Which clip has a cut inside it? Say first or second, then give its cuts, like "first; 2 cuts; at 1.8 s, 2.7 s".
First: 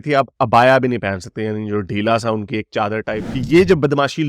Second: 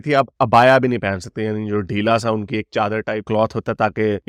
first; 1 cut; at 3.2 s